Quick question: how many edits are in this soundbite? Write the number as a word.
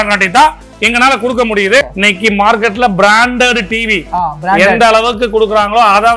one